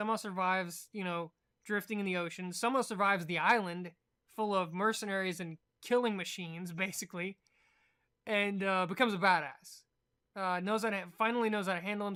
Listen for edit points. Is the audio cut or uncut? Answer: uncut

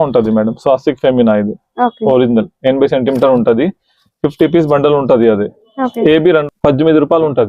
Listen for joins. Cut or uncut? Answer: cut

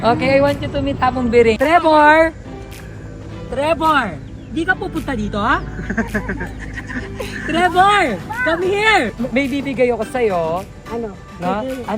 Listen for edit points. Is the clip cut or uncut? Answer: cut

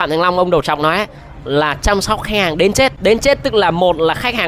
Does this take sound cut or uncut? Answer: cut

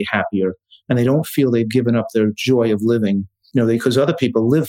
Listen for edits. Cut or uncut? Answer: cut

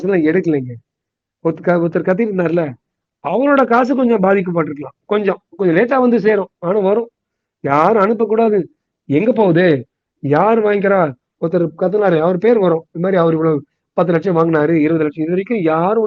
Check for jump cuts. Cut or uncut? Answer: uncut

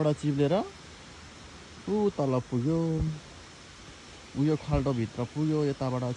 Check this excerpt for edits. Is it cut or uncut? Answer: uncut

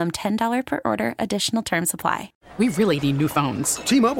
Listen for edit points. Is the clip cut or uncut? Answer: cut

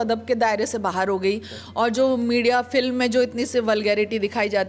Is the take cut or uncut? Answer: uncut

